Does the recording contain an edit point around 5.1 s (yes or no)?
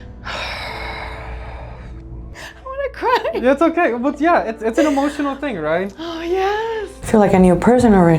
no